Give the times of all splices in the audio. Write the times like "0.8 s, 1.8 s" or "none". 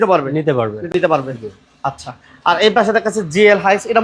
0.9 s